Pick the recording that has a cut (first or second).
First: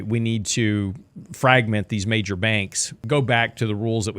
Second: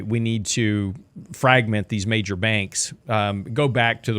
first